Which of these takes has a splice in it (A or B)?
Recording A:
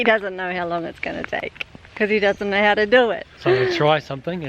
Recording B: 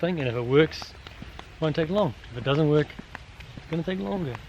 A